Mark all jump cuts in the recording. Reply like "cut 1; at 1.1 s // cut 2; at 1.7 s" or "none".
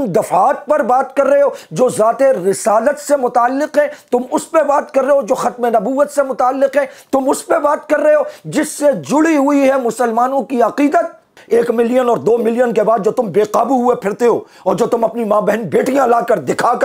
cut 1; at 11.4 s